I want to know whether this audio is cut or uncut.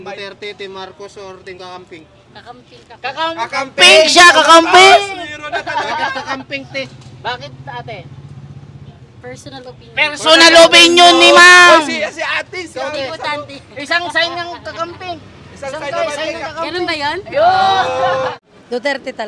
cut